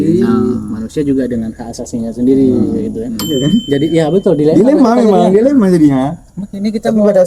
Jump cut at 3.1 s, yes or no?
yes